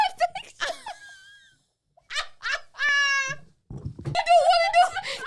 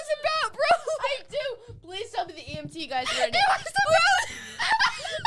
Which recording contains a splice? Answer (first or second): first